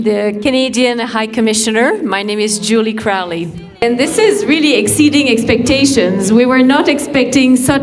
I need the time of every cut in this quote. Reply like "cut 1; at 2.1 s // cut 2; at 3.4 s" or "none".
cut 1; at 3.8 s

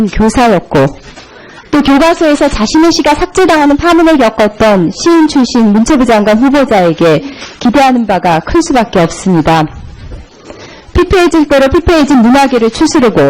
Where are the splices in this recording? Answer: cut 1; at 2.1 s

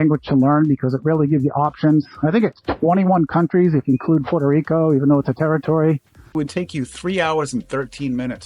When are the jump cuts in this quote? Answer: cut 1; at 6.3 s

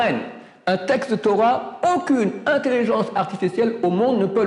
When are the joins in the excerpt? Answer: none

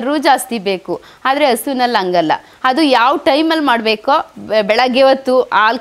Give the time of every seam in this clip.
none

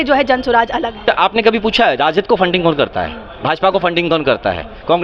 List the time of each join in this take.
cut 1; at 1.0 s

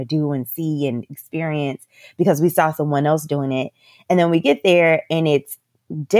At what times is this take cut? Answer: none

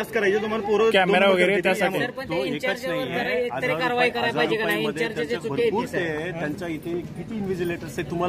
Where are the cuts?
none

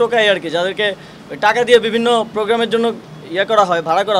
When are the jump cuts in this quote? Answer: none

